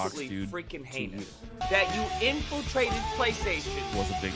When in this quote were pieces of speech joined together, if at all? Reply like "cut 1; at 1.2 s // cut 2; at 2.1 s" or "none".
cut 1; at 1.6 s